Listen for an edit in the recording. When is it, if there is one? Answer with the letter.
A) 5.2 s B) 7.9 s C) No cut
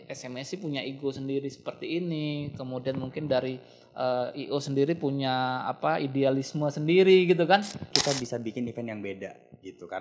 B